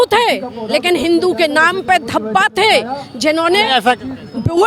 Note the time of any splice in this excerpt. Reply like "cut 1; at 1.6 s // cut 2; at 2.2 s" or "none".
none